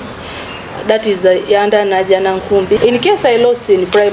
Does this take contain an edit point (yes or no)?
yes